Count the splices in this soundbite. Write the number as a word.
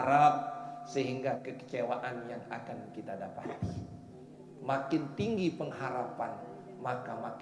one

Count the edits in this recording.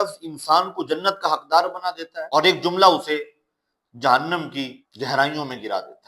two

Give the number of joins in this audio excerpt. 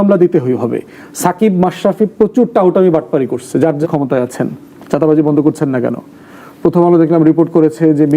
one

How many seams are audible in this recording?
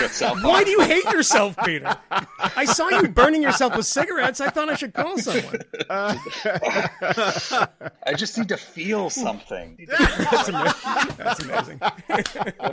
zero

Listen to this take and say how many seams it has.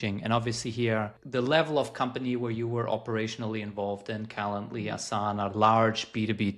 one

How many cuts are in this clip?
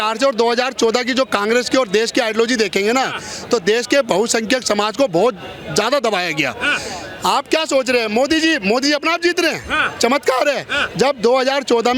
zero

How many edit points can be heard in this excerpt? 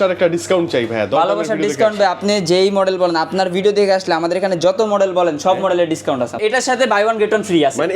one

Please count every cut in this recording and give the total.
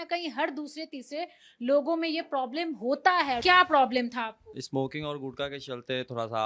two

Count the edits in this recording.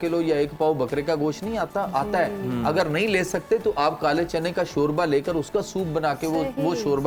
zero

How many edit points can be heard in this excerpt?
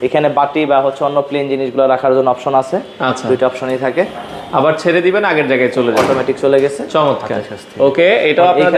zero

